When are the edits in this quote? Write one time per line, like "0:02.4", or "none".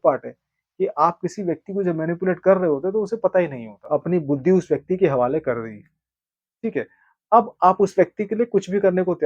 0:03.8